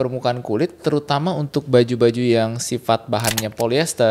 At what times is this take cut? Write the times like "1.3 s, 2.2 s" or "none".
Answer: none